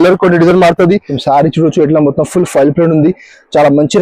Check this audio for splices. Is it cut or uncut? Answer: cut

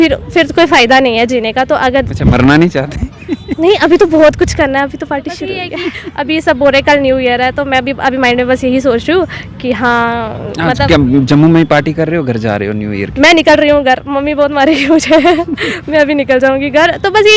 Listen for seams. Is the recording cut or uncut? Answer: cut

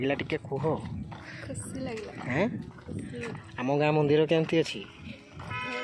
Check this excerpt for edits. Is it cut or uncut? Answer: uncut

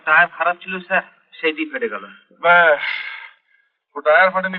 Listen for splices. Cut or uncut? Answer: uncut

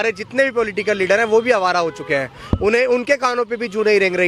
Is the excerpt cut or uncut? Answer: uncut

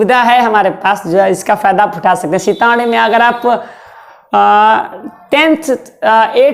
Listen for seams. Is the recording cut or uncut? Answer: uncut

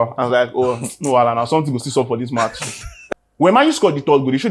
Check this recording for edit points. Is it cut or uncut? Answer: cut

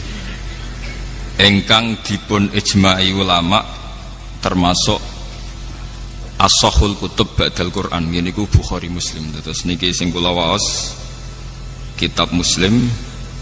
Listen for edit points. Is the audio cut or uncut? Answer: uncut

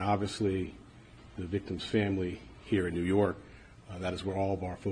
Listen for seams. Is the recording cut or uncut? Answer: cut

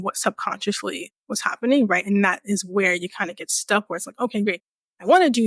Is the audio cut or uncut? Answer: uncut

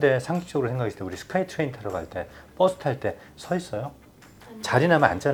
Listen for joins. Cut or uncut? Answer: uncut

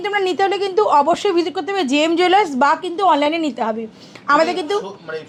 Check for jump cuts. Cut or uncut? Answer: uncut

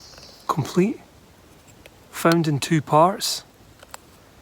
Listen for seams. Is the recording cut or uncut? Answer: uncut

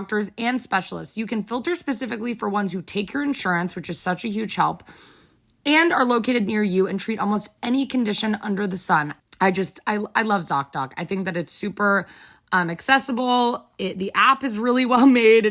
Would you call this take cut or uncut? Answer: cut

